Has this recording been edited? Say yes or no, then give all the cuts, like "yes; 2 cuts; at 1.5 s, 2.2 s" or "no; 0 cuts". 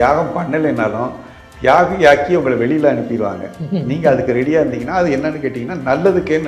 no; 0 cuts